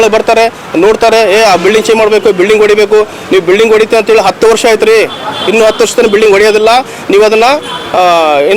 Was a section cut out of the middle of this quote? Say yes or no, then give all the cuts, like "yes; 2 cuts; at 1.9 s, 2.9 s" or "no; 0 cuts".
no; 0 cuts